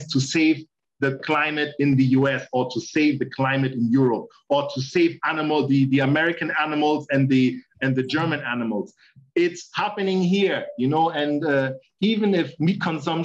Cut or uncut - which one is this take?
cut